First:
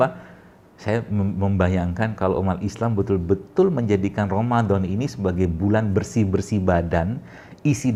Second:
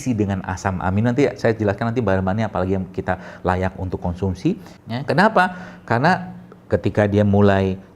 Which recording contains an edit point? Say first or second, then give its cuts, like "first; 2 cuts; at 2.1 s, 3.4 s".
second; 1 cut; at 4.7 s